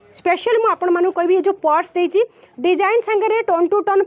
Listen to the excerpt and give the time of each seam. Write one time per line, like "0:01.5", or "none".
none